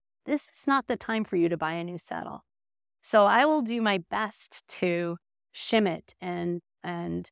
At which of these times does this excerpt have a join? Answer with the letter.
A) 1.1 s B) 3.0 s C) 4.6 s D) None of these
D